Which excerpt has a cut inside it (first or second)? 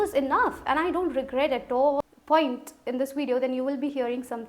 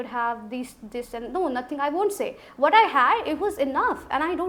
first